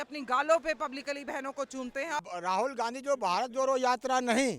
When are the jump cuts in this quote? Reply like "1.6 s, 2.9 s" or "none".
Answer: 2.3 s